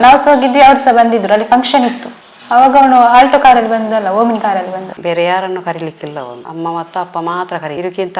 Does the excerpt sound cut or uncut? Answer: cut